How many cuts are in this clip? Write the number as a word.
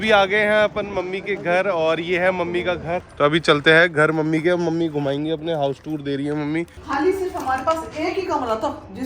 two